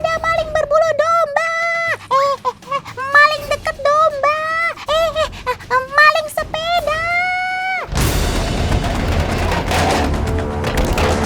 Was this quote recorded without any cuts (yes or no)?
yes